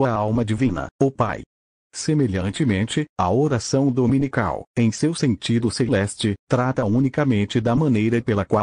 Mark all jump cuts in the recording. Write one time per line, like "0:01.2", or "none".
none